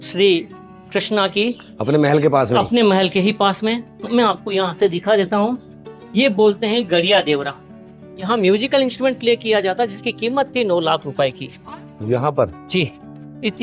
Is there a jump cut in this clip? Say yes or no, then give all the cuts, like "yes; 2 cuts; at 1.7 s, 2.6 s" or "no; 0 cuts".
yes; 1 cut; at 8.1 s